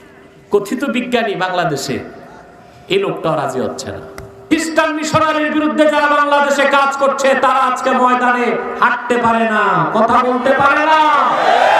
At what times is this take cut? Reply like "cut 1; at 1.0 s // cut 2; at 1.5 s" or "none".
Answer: cut 1; at 4.5 s